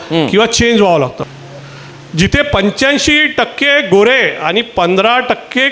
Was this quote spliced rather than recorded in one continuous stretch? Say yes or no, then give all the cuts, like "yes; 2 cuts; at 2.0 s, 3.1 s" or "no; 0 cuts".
yes; 1 cut; at 1.2 s